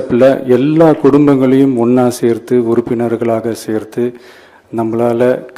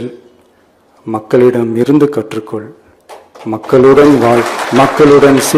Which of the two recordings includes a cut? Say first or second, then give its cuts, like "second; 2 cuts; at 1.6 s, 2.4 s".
second; 1 cut; at 4.6 s